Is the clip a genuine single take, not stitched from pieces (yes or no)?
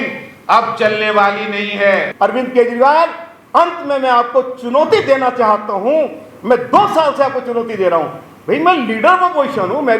no